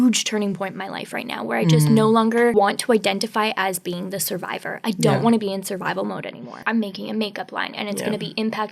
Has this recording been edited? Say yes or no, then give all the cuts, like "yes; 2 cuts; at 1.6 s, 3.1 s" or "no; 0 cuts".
yes; 2 cuts; at 2.5 s, 6.6 s